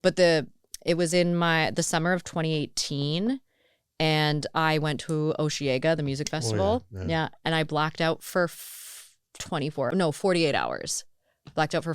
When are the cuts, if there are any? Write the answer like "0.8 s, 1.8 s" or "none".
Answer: 9.9 s